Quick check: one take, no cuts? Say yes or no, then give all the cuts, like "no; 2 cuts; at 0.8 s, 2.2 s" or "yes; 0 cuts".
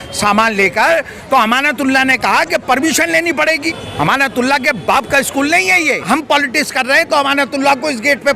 no; 2 cuts; at 3.6 s, 6.0 s